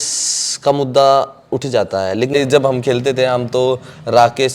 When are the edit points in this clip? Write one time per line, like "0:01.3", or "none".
0:02.3